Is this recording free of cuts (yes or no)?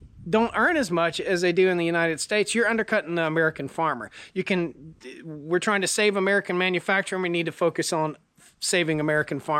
yes